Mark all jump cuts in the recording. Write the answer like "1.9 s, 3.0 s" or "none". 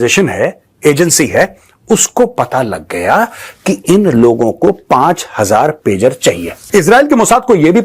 none